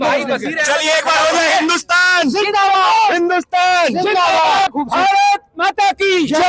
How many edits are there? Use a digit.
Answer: 1